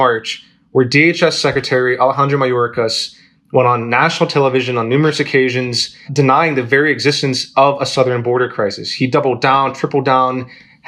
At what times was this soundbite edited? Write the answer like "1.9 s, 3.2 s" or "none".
none